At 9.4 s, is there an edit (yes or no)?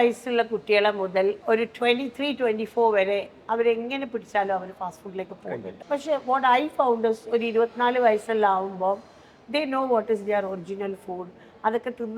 no